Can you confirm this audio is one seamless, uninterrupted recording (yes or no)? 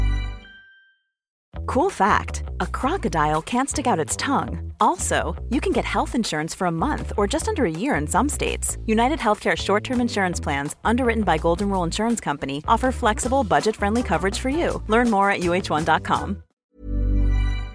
no